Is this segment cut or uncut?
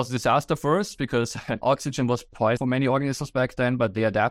cut